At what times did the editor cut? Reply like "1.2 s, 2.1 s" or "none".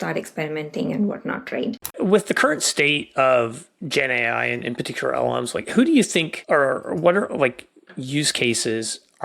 1.9 s, 6.4 s